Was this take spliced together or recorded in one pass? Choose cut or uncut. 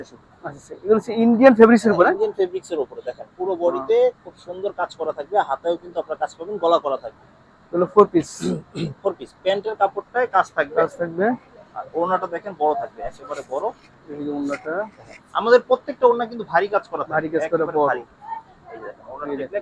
uncut